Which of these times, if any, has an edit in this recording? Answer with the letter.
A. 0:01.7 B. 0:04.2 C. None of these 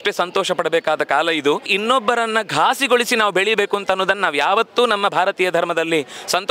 A